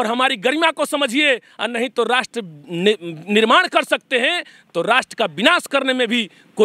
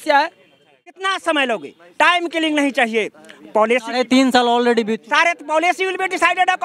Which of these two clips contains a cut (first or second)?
second